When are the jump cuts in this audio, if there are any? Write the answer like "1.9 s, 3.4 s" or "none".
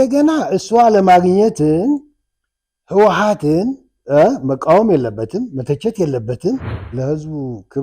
6.8 s